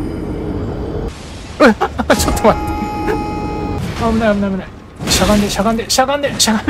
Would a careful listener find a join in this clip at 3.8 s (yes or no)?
yes